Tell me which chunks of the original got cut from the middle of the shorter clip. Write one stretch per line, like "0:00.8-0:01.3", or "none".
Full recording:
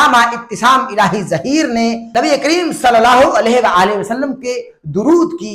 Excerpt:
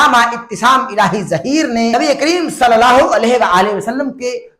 0:01.9-0:02.1